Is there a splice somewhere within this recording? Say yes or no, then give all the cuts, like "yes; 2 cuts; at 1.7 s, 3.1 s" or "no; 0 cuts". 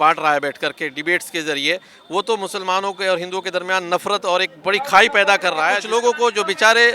yes; 1 cut; at 5.8 s